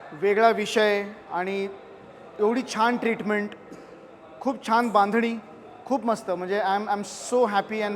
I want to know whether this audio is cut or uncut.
uncut